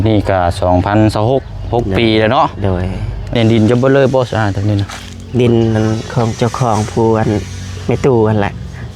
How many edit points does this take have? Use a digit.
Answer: 1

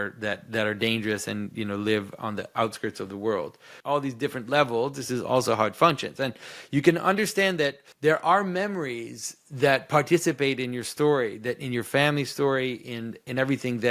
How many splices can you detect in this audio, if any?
2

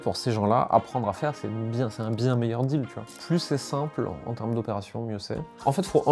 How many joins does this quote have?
1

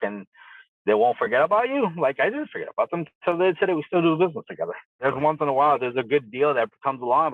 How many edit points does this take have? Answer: 1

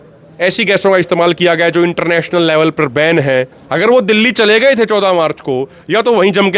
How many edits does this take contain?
1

